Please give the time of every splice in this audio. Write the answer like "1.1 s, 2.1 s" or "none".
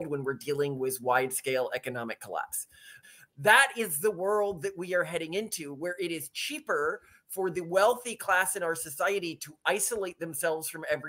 2.9 s